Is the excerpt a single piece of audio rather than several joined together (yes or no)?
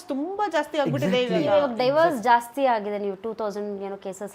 yes